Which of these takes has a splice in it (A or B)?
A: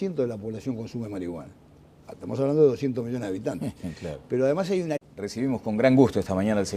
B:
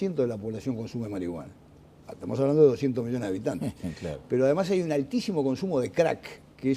B